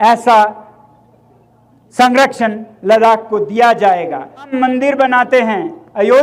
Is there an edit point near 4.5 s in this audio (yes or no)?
yes